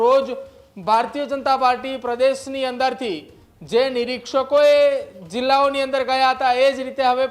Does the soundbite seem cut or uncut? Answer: uncut